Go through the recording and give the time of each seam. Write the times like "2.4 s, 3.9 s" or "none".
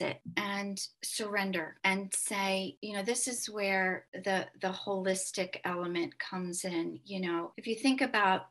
none